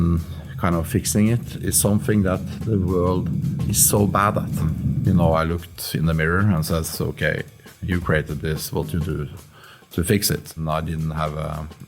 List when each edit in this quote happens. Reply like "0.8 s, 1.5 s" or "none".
5.0 s, 10.5 s